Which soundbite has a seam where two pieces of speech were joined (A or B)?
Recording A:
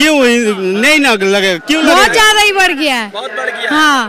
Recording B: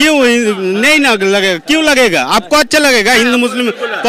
A